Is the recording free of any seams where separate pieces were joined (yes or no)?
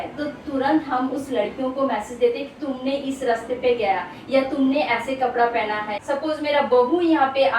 no